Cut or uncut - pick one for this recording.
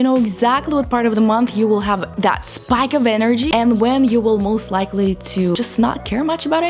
cut